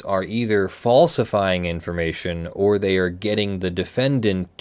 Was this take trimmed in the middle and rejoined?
no; 0 cuts

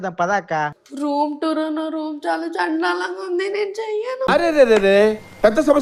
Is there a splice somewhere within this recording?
no; 0 cuts

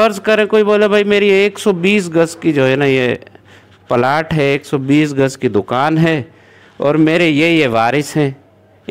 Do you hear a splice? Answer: no; 0 cuts

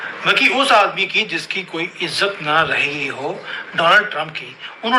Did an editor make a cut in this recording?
no; 0 cuts

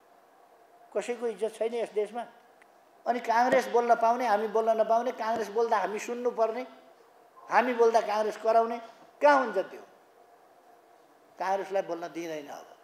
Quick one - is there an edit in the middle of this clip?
yes; 1 cut; at 2.4 s

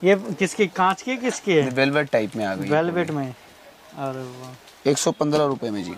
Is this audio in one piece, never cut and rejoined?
yes; 0 cuts

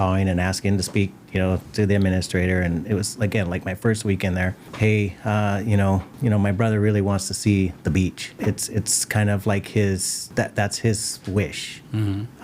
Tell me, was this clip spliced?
yes; 4 cuts; at 4.6 s, 6.1 s, 8.3 s, 10.2 s

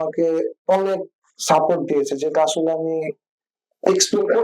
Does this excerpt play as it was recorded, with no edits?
yes; 0 cuts

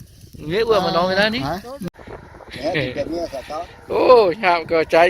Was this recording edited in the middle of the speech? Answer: yes; 1 cut; at 1.8 s

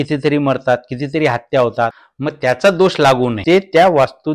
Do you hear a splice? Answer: yes; 2 cuts; at 2.1 s, 3.4 s

